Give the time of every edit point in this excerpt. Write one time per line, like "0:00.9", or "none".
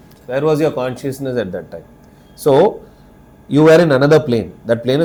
none